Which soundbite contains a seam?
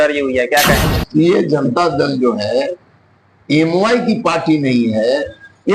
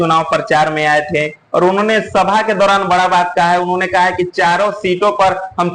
first; 1 cut; at 1.0 s

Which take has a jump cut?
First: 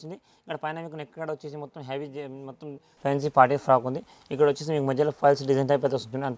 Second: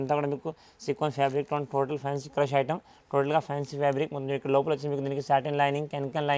first; 1 cut; at 2.9 s

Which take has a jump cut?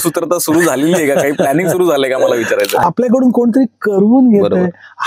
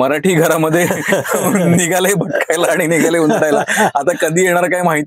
first; 1 cut; at 2.8 s

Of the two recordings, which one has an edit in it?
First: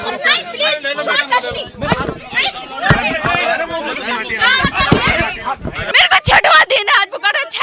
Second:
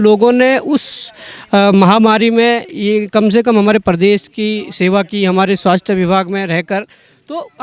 first; 1 cut; at 5.7 s

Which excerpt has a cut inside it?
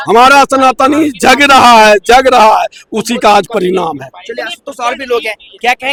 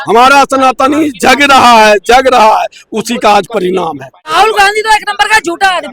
second; 1 cut; at 4.3 s

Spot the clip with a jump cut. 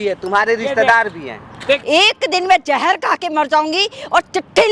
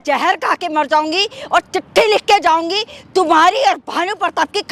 first; 1 cut; at 1.6 s

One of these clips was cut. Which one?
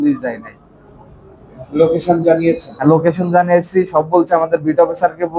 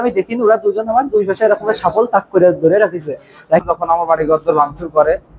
second; 1 cut; at 3.6 s

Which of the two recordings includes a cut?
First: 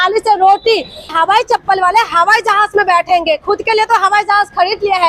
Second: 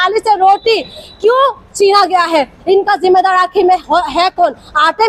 first; 1 cut; at 1.1 s

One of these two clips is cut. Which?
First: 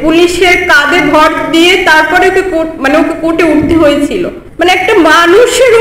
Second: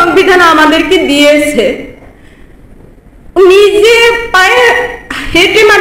first; 1 cut; at 4.4 s

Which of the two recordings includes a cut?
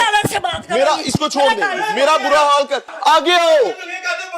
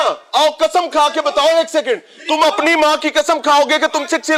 first; 1 cut; at 2.9 s

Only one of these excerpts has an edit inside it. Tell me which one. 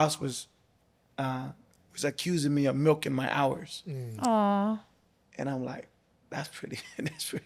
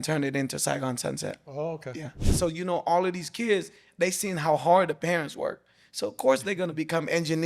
second; 1 cut; at 2.2 s

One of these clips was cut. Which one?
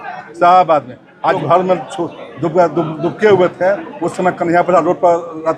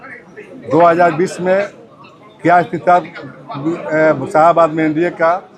first; 1 cut; at 1.4 s

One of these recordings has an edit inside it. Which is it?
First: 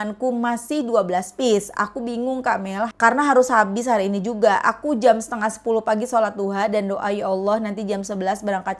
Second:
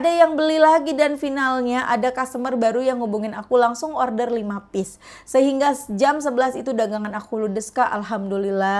first; 1 cut; at 2.9 s

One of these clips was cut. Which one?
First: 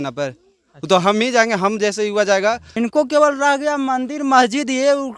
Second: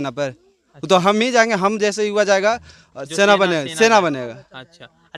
first; 1 cut; at 2.7 s

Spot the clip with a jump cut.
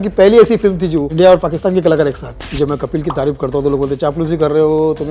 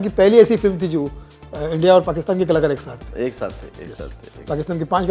first; 2 cuts; at 1.1 s, 2.3 s

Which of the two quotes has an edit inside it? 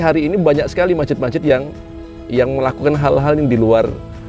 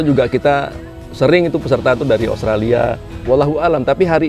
second; 1 cut; at 3.1 s

